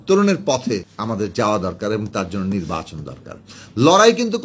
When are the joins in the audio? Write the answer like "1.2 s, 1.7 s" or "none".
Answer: 0.9 s